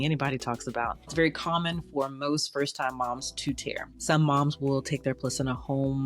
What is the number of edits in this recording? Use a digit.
2